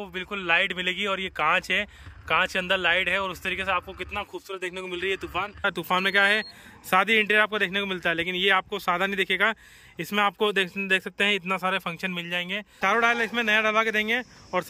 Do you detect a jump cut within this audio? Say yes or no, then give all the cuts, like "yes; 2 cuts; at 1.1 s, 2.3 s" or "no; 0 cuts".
yes; 2 cuts; at 5.6 s, 12.6 s